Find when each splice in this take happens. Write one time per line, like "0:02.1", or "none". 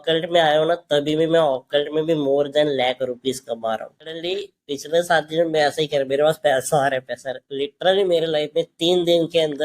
0:04.2

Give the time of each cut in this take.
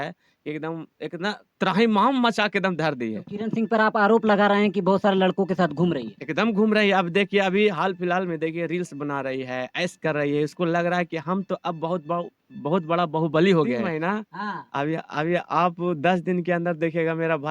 0:13.8

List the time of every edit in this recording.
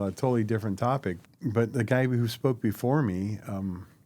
0:01.2

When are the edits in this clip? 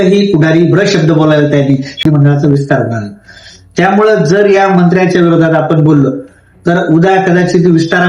0:02.0

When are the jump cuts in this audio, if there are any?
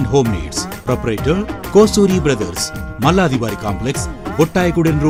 none

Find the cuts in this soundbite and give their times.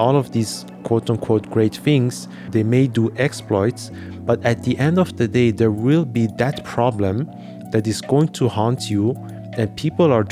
0:02.4

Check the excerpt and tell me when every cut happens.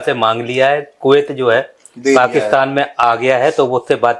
none

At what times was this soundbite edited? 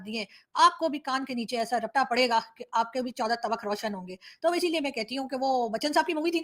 none

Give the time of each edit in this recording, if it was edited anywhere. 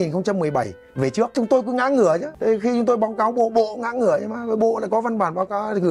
0:01.3
0:02.3

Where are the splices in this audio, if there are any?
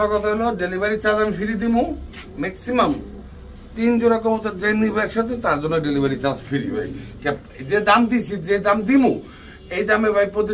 none

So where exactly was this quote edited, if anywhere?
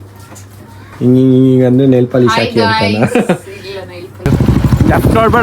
0:04.3

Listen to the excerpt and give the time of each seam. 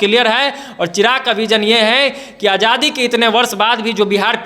none

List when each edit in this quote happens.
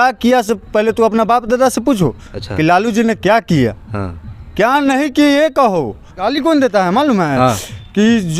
0:06.3

